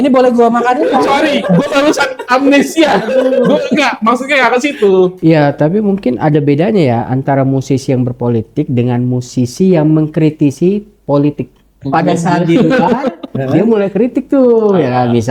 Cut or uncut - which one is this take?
cut